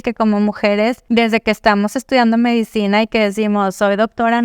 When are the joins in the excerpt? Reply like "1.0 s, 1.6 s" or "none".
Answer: 1.0 s